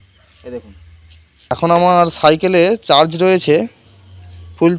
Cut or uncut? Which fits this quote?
cut